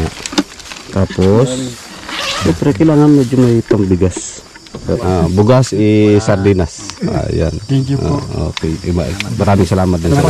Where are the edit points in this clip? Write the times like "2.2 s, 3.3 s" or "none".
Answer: 4.5 s